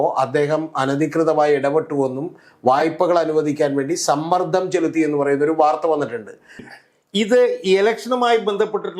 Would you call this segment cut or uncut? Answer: cut